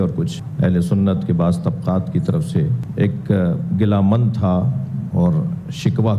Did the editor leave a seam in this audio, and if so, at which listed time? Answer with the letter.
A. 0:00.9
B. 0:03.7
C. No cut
C